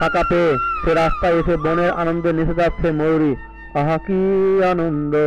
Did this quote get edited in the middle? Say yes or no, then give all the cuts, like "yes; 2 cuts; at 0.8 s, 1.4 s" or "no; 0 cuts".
no; 0 cuts